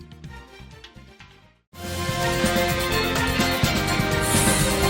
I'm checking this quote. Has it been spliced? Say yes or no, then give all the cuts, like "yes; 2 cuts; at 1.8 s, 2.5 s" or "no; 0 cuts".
yes; 1 cut; at 1.2 s